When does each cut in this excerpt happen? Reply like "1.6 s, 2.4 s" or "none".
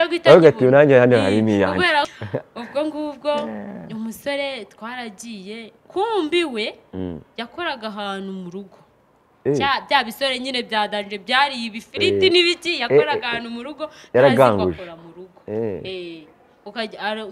2.1 s